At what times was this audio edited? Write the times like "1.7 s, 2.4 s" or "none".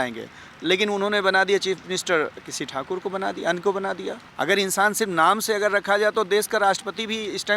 4.2 s

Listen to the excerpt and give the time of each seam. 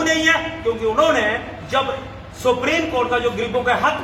none

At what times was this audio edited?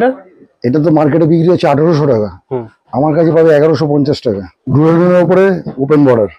4.5 s

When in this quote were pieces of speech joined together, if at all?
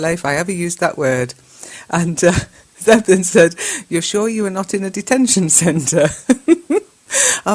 1.4 s

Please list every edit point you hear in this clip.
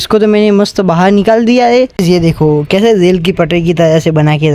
1.9 s

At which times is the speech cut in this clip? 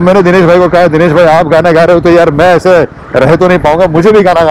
none

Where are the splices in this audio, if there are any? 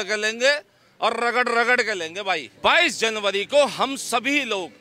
2.5 s

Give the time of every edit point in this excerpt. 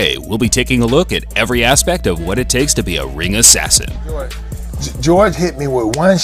none

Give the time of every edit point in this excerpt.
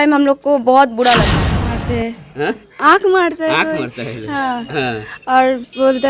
1.4 s

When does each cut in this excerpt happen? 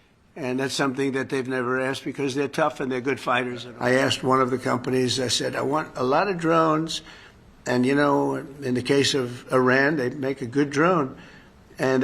3.6 s

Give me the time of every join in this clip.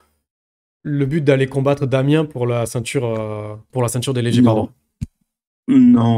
3.6 s

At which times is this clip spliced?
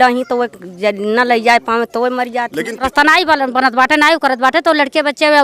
2.7 s

